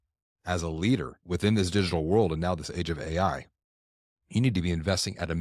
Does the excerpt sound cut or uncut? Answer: cut